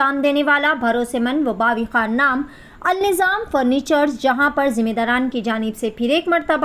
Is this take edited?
no; 0 cuts

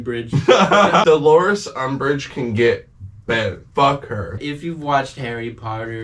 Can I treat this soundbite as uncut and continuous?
no; 2 cuts; at 1.0 s, 4.4 s

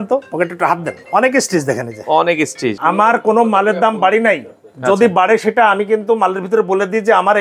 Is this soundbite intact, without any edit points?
no; 2 cuts; at 1.0 s, 2.8 s

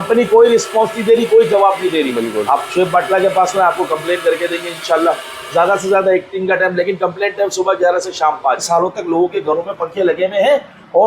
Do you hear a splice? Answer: yes; 1 cut; at 8.6 s

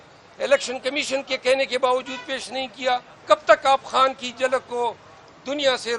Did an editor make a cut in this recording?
yes; 1 cut; at 3.1 s

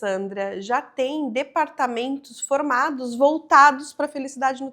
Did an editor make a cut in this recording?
no; 0 cuts

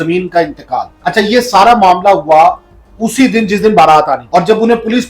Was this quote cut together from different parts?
yes; 2 cuts; at 1.0 s, 4.2 s

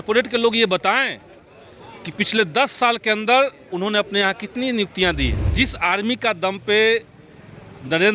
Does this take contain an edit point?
yes; 1 cut; at 5.4 s

